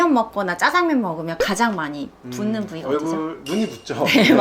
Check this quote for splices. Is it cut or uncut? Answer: uncut